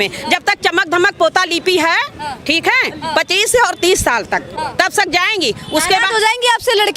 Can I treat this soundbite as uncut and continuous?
yes; 0 cuts

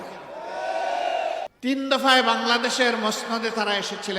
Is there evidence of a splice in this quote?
yes; 1 cut; at 1.5 s

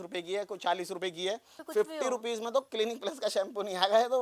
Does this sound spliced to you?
yes; 1 cut; at 1.6 s

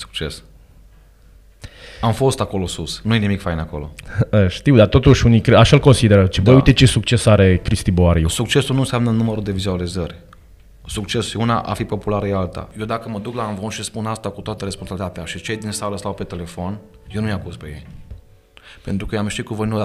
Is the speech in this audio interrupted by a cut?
yes; 1 cut; at 12.7 s

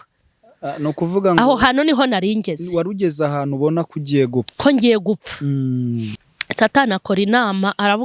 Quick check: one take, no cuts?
no; 1 cut; at 6.2 s

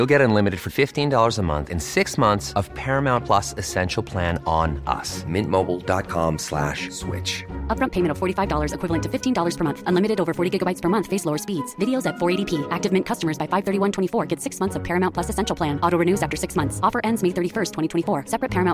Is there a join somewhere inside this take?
no; 0 cuts

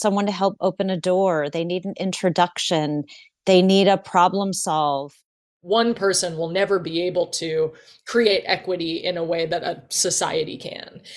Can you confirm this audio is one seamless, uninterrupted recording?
no; 1 cut; at 5.4 s

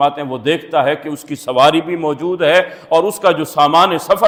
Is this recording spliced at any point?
no; 0 cuts

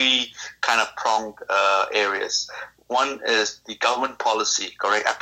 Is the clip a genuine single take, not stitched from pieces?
yes; 0 cuts

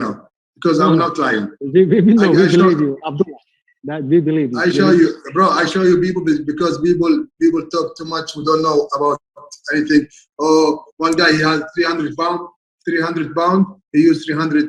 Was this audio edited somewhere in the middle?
no; 0 cuts

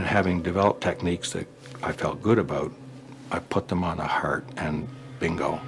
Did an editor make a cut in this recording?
no; 0 cuts

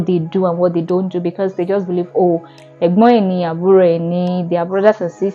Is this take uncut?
yes; 0 cuts

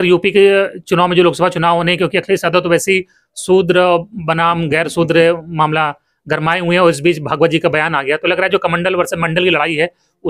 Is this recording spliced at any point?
no; 0 cuts

